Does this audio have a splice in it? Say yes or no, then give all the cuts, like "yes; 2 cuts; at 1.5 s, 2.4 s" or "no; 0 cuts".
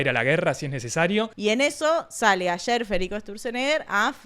yes; 1 cut; at 1.3 s